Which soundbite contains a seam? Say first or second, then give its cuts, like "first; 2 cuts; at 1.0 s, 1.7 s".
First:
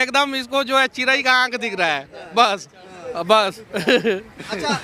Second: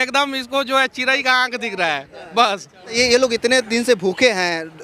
second; 1 cut; at 3.0 s